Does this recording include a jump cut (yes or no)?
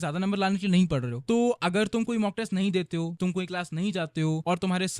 no